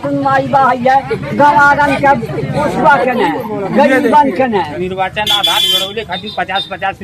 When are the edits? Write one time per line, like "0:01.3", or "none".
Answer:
0:04.7